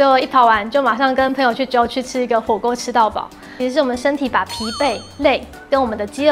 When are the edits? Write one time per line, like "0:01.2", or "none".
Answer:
0:03.5